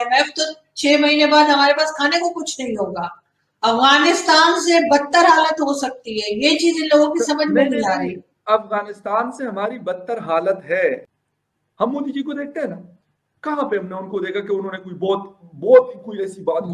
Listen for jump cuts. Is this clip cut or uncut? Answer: cut